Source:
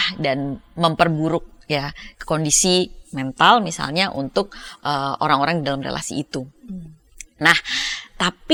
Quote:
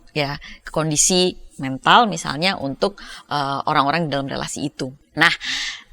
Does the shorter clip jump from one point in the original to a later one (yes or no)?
yes